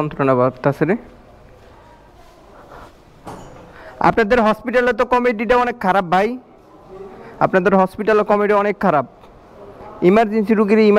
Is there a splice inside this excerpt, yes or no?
no